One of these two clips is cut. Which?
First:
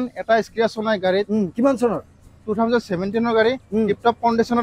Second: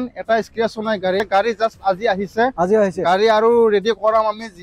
second; 1 cut; at 1.2 s

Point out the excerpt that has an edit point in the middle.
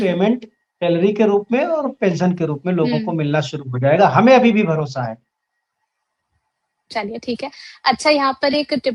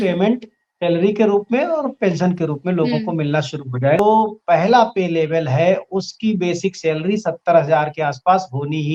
second; 1 cut; at 4.0 s

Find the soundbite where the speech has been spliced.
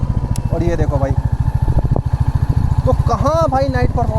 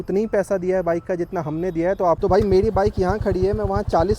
second; 1 cut; at 2.2 s

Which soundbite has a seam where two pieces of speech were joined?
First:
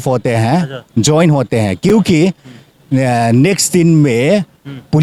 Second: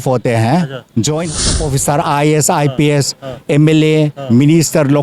second; 1 cut; at 1.5 s

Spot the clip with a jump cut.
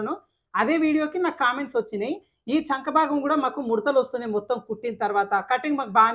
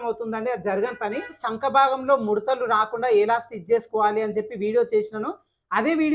second; 1 cut; at 1.4 s

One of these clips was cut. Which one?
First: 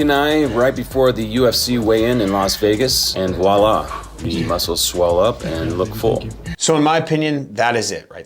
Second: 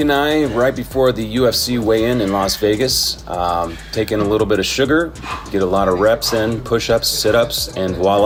first; 2 cuts; at 3.0 s, 6.5 s

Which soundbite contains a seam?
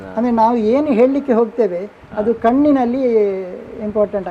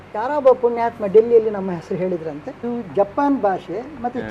second; 1 cut; at 2.6 s

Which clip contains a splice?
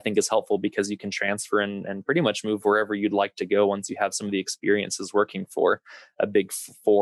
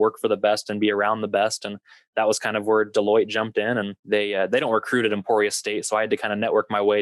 second; 1 cut; at 4.0 s

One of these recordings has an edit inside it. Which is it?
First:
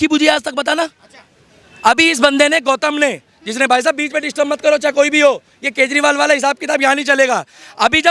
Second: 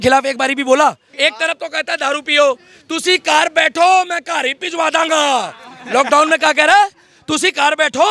second; 1 cut; at 1.1 s

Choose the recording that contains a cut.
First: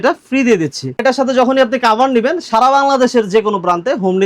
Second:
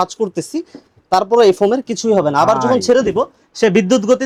first; 1 cut; at 1.0 s

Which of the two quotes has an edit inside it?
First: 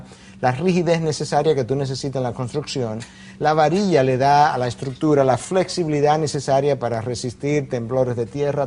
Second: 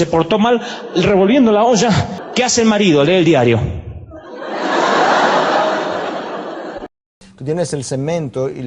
second; 2 cuts; at 2.1 s, 6.9 s

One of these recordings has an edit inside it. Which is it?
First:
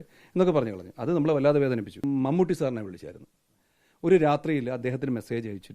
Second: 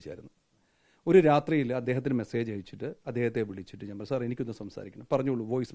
first; 1 cut; at 2.0 s

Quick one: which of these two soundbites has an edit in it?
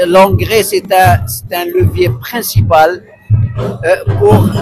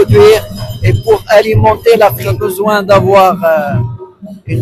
second; 1 cut; at 2.3 s

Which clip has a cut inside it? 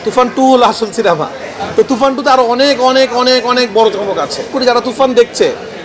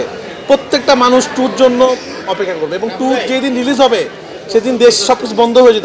first; 1 cut; at 4.5 s

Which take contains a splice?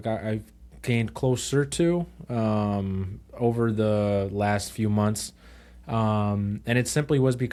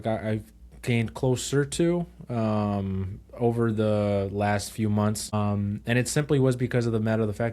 second; 1 cut; at 5.3 s

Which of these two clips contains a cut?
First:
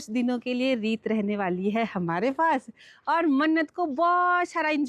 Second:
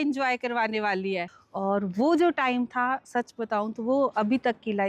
second; 1 cut; at 1.2 s

